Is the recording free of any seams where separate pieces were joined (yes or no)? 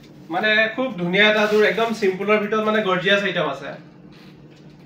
yes